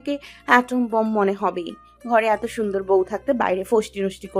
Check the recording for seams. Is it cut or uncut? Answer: uncut